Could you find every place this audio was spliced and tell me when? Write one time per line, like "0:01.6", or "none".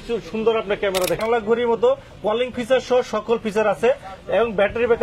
0:01.2